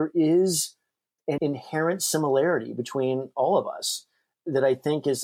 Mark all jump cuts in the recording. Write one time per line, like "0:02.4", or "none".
0:01.4
0:04.3